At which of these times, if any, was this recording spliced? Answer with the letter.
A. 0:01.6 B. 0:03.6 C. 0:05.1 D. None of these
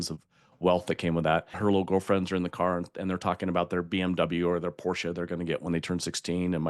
A